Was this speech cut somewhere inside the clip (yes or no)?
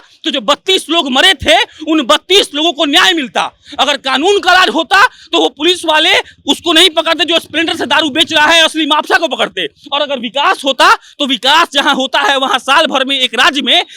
no